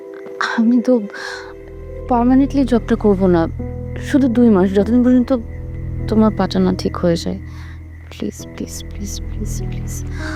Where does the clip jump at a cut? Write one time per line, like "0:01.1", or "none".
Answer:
none